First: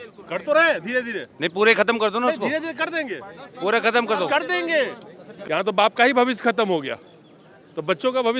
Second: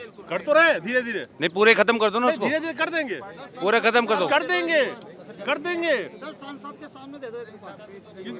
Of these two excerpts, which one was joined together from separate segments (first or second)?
first